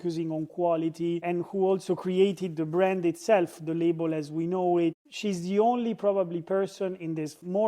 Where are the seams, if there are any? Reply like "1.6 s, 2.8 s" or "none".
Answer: 5.1 s